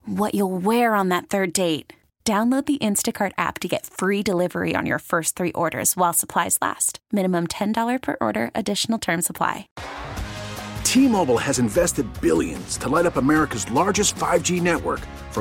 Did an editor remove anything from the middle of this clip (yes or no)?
yes